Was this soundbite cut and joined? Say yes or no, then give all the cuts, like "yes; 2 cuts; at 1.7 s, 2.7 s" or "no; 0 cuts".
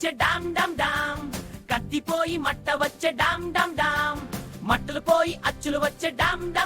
no; 0 cuts